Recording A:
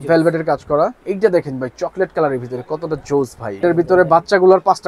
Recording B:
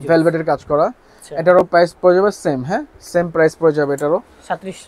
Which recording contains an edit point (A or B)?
A